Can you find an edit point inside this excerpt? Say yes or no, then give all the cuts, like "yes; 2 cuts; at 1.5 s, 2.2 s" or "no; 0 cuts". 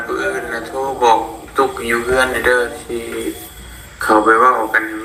no; 0 cuts